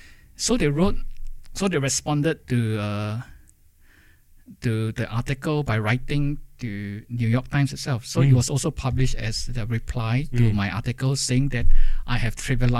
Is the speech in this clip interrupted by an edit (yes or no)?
no